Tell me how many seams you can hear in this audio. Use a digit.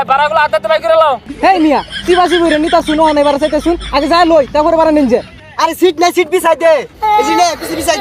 2